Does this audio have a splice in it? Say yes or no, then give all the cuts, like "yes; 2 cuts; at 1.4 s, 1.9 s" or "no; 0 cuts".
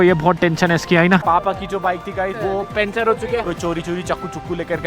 yes; 2 cuts; at 1.2 s, 3.5 s